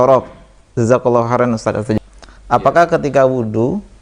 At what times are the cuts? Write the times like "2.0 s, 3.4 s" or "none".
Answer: 2.0 s